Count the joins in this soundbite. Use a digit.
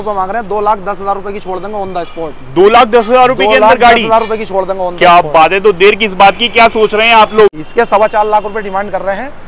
1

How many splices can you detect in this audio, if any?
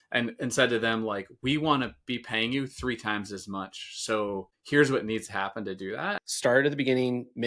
1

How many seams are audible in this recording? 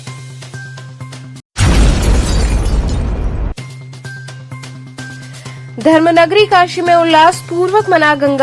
2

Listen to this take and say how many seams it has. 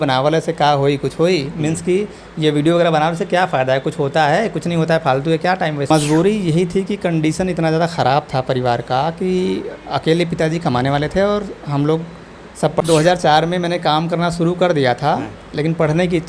2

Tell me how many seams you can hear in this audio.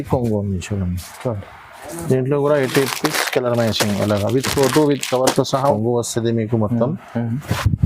1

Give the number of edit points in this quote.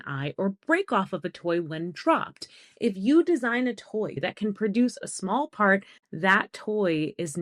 2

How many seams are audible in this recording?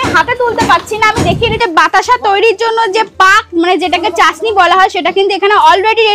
1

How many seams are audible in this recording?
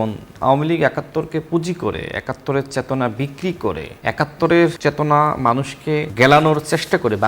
3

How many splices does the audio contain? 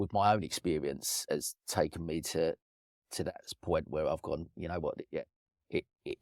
1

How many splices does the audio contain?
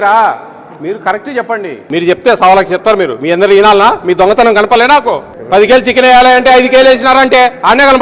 2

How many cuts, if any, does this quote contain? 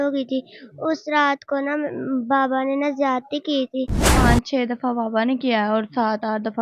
1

